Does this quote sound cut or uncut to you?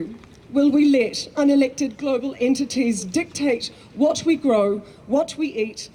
uncut